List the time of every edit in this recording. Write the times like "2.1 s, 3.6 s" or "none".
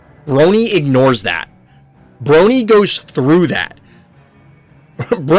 none